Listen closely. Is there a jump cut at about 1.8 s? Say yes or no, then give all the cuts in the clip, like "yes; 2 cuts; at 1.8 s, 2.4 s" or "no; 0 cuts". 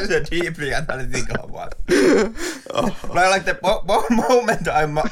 yes; 1 cut; at 1.8 s